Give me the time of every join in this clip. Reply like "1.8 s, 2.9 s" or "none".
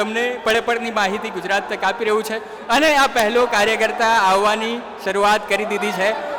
none